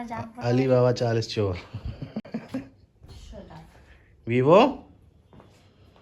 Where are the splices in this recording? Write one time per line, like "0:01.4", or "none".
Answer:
none